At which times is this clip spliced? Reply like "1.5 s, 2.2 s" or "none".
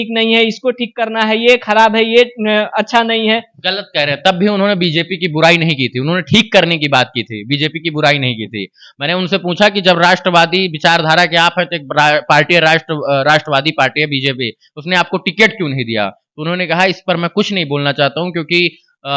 none